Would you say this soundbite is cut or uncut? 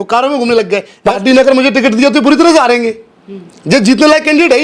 cut